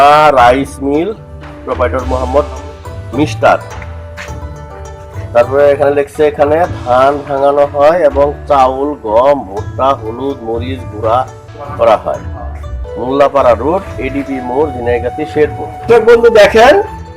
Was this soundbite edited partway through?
yes; 1 cut; at 15.9 s

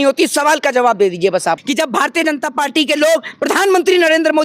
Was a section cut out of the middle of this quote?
yes; 1 cut; at 1.6 s

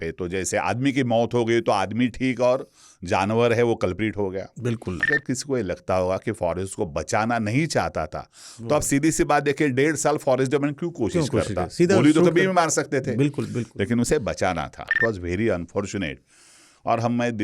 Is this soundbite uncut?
no; 2 cuts; at 5.0 s, 14.9 s

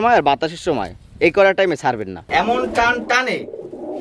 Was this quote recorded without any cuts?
no; 1 cut; at 2.2 s

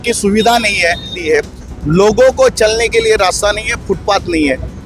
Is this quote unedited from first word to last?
no; 1 cut; at 1.2 s

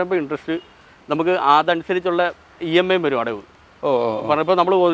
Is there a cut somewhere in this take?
no; 0 cuts

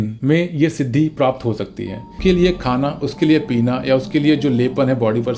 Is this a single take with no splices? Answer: no; 1 cut; at 2.1 s

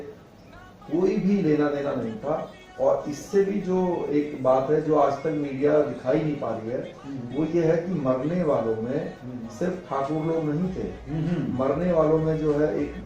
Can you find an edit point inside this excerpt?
no; 0 cuts

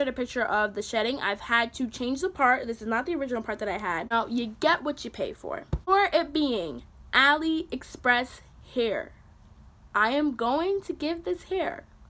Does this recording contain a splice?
yes; 2 cuts; at 4.1 s, 5.8 s

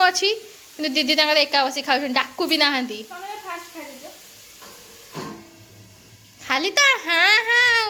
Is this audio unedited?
yes; 0 cuts

